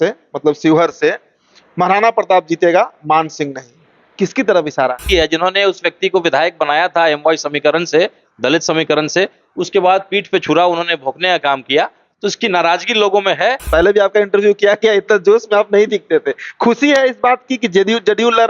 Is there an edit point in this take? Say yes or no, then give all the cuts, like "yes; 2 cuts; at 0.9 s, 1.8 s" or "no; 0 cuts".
yes; 2 cuts; at 5.0 s, 13.7 s